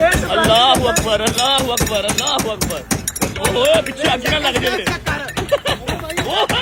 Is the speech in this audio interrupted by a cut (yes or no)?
no